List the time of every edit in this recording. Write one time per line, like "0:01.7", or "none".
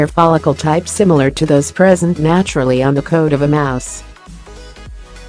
0:03.8